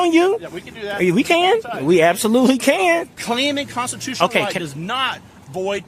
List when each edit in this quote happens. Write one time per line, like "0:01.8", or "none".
0:03.1